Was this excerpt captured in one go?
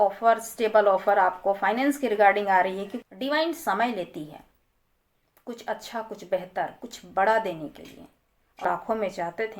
no; 2 cuts; at 3.0 s, 8.6 s

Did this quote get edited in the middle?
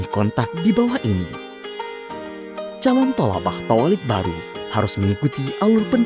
no; 0 cuts

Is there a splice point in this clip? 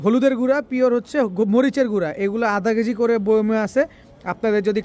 no; 0 cuts

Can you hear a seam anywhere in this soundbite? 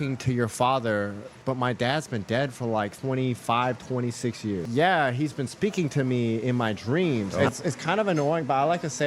yes; 4 cuts; at 1.4 s, 3.0 s, 4.6 s, 7.4 s

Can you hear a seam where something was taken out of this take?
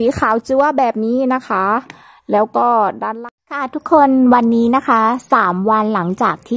yes; 1 cut; at 3.2 s

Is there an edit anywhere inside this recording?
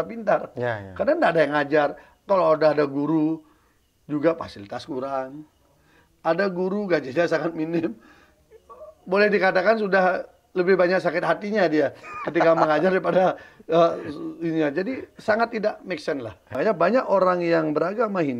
yes; 1 cut; at 16.6 s

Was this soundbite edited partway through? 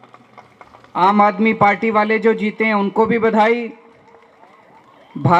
yes; 1 cut; at 1.0 s

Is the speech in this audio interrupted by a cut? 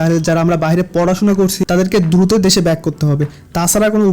yes; 1 cut; at 1.6 s

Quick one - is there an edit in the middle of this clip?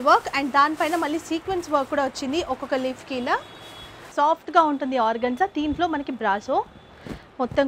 yes; 1 cut; at 3.7 s

